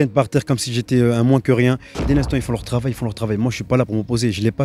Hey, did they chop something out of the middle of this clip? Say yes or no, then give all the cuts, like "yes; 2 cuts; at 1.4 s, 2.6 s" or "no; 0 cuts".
yes; 1 cut; at 1.9 s